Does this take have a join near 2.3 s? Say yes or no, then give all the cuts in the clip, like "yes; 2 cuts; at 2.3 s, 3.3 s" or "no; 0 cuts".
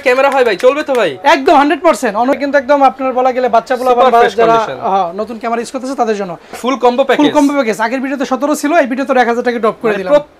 yes; 2 cuts; at 2.3 s, 6.6 s